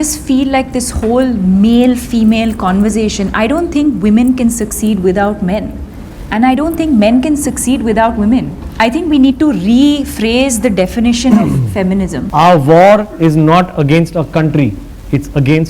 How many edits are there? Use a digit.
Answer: 2